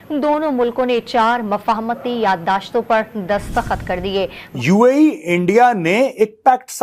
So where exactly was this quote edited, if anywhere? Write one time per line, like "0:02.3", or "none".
0:04.4